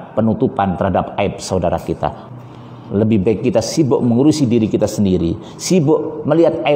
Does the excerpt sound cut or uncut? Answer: cut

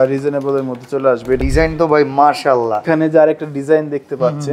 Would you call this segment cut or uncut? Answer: cut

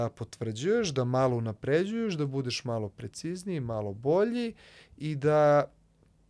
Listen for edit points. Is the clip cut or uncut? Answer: uncut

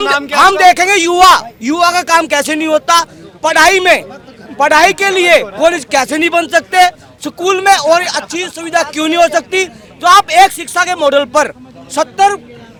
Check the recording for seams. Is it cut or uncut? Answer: uncut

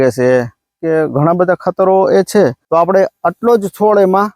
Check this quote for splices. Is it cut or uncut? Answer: cut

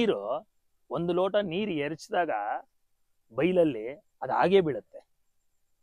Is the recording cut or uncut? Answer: uncut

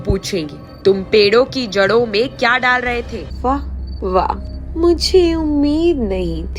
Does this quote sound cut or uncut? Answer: cut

